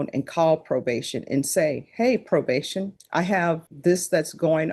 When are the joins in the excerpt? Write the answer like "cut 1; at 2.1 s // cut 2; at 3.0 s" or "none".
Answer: cut 1; at 3.0 s // cut 2; at 3.7 s